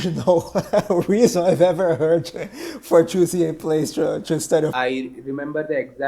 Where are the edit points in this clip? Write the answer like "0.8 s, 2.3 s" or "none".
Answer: 4.7 s